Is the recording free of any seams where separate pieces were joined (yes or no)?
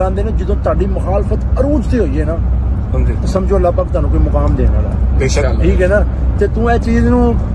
yes